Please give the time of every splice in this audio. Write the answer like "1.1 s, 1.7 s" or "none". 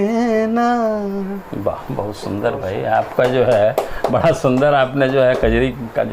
none

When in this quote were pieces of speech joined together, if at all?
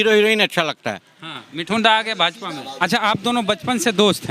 2.7 s

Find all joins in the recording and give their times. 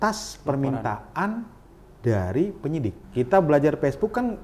3.0 s

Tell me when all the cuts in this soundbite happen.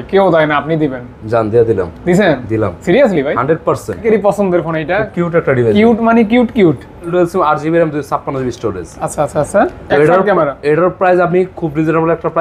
4.0 s, 7.1 s

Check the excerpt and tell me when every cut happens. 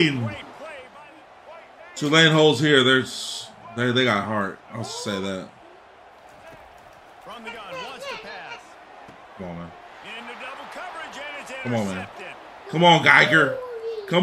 1.0 s

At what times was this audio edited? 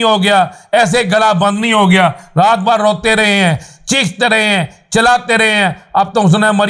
none

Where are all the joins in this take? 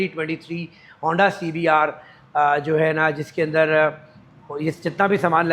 none

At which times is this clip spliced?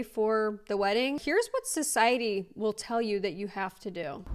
1.2 s

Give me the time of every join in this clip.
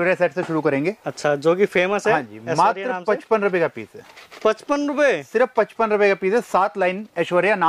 none

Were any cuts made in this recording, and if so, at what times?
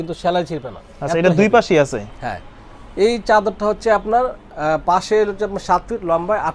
none

